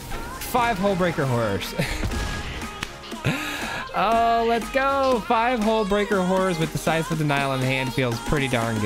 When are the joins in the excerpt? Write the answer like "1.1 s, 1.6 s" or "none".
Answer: none